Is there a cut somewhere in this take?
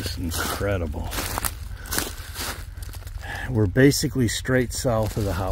no; 0 cuts

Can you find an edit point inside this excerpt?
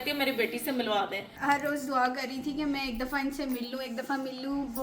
yes; 1 cut; at 1.3 s

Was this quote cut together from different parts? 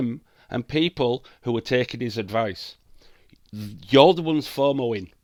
no; 0 cuts

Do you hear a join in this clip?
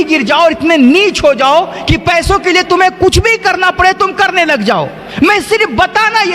no; 0 cuts

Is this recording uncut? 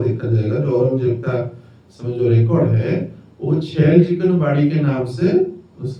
yes; 0 cuts

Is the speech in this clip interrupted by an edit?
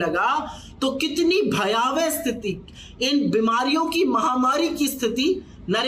no; 0 cuts

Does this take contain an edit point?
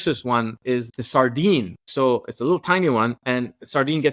yes; 2 cuts; at 0.9 s, 1.8 s

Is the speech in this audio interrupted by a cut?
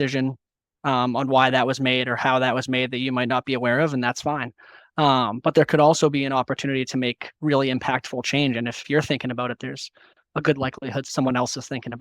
yes; 2 cuts; at 8.8 s, 11.1 s

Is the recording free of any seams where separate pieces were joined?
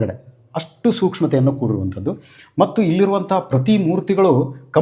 yes; 0 cuts

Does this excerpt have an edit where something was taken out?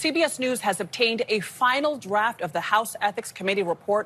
no; 0 cuts

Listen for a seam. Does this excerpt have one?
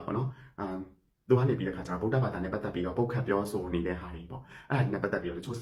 no; 0 cuts

